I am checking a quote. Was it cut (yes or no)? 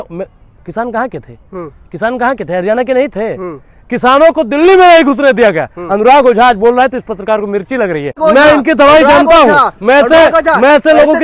yes